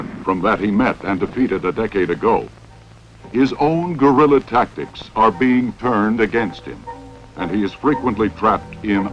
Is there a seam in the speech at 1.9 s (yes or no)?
yes